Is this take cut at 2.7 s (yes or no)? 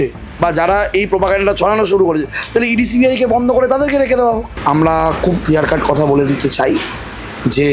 no